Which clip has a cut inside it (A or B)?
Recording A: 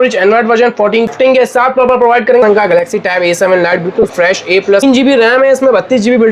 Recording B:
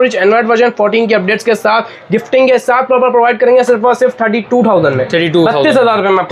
A